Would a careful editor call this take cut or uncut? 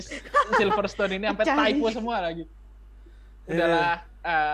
uncut